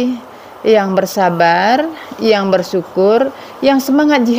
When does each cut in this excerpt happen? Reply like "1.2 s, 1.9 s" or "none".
none